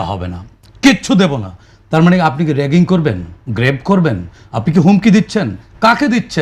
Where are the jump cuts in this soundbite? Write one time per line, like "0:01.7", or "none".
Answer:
none